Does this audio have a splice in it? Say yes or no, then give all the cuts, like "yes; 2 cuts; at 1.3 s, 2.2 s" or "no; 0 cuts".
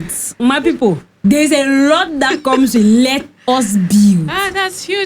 yes; 1 cut; at 1.1 s